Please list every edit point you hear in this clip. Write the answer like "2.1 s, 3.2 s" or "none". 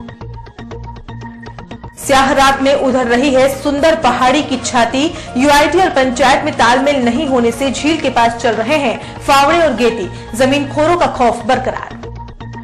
1.8 s